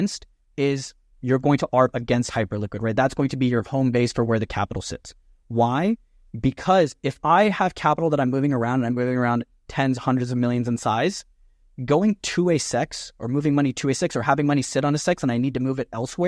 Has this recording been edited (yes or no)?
no